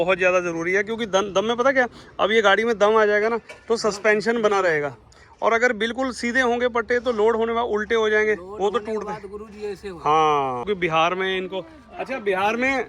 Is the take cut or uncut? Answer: cut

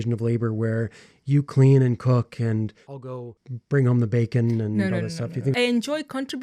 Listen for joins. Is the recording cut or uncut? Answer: cut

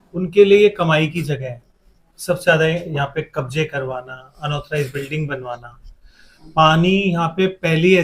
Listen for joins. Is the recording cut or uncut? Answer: uncut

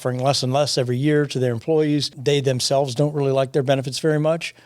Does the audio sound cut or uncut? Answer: cut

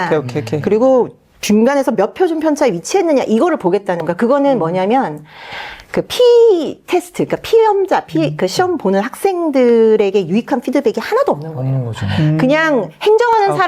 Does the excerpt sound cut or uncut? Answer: uncut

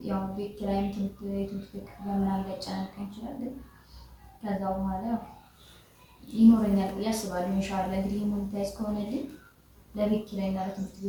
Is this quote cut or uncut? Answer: uncut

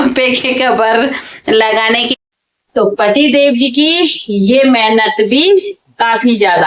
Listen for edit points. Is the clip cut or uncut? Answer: cut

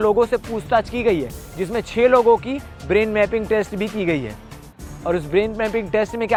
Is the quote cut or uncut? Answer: uncut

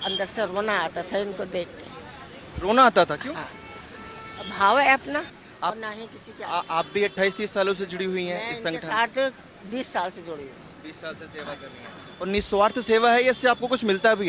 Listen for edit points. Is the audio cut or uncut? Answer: cut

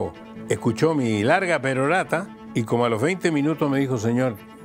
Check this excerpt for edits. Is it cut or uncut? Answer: cut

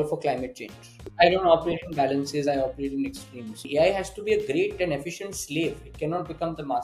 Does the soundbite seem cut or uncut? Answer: cut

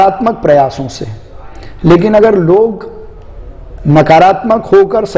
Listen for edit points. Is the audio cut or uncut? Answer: uncut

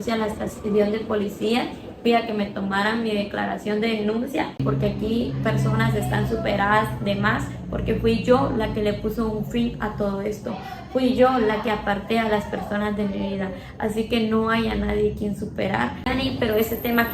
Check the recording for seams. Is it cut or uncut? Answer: cut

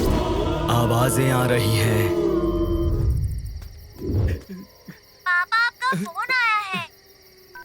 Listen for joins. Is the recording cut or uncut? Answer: cut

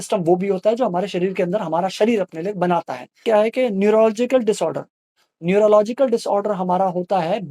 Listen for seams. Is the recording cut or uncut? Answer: cut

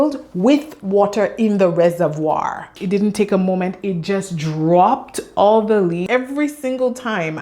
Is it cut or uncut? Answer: cut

